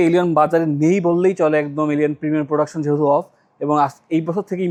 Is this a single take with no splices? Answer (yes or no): yes